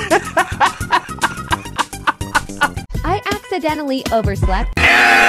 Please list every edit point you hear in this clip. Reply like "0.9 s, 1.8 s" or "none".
2.8 s